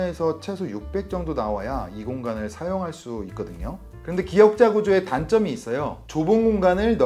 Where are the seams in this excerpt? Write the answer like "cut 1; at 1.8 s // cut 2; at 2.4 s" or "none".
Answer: cut 1; at 6.0 s